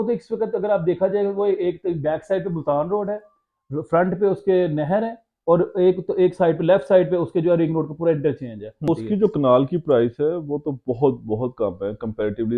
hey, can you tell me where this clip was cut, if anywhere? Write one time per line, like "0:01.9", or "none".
0:08.7